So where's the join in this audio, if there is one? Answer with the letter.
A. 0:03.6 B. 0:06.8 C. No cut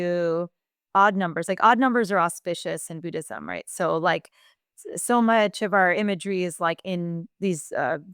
C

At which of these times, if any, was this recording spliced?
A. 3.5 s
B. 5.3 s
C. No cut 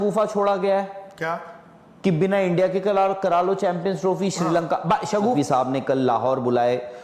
B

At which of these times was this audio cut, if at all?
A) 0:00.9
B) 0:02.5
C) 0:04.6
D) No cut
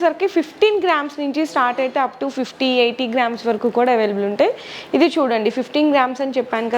D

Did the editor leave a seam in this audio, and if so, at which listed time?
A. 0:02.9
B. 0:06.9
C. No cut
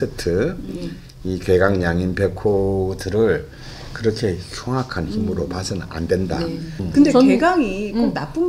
B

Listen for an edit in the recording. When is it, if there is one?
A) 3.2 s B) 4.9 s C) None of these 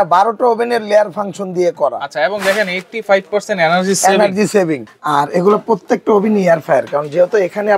B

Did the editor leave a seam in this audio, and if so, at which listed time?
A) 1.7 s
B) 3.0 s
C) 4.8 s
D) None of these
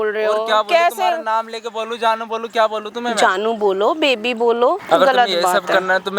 C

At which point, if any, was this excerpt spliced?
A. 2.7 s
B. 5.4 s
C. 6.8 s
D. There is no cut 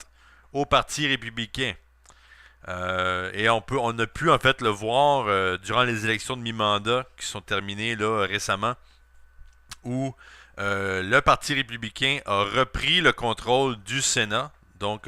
C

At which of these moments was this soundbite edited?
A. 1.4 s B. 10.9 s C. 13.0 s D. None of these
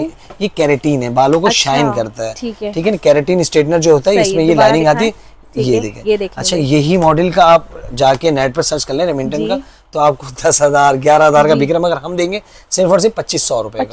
D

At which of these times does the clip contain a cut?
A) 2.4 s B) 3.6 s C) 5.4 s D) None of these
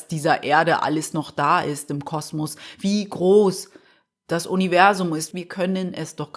C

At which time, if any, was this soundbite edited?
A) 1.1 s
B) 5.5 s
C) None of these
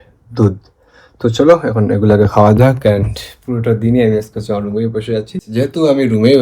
B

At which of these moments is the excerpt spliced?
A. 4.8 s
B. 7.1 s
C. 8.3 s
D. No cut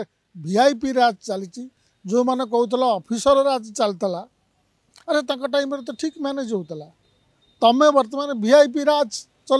D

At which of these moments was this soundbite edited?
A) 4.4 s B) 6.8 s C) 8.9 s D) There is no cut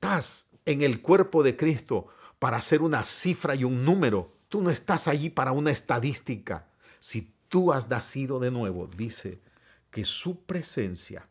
A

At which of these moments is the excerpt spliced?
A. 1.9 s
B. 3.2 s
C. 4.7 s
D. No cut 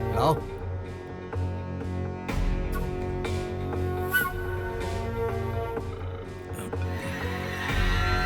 C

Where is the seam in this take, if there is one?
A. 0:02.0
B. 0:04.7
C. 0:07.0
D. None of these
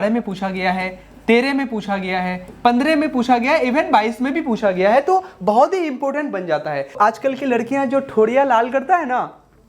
C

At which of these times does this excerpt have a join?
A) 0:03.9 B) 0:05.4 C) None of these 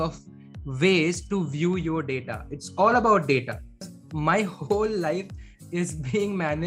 A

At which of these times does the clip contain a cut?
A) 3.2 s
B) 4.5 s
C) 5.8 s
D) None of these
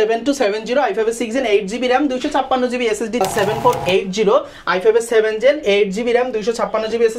A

